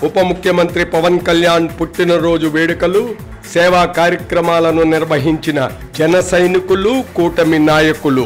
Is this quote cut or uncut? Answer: uncut